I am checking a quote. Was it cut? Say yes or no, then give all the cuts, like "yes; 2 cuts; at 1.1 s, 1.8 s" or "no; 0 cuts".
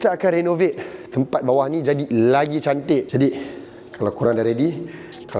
yes; 1 cut; at 3.1 s